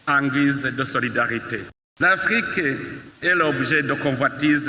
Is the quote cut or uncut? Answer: cut